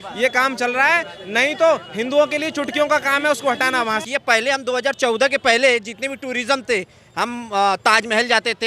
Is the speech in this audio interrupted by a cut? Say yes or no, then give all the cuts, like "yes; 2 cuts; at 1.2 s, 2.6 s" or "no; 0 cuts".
yes; 1 cut; at 4.0 s